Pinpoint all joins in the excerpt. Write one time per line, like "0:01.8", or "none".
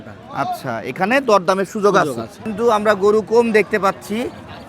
0:02.5